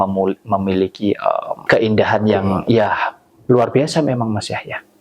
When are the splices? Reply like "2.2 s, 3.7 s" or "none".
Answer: 1.6 s